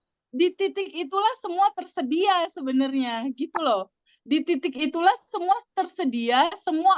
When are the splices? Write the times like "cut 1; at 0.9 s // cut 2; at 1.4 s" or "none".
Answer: none